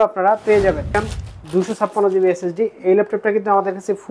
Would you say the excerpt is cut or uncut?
cut